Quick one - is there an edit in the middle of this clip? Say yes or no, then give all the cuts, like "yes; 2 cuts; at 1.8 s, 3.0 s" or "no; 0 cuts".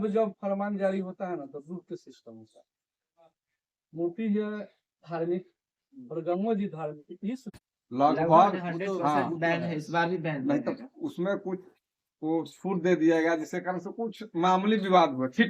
yes; 1 cut; at 7.5 s